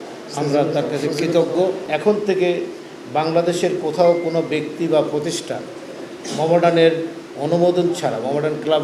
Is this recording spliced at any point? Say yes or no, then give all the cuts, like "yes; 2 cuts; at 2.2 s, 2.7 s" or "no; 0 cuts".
yes; 1 cut; at 1.8 s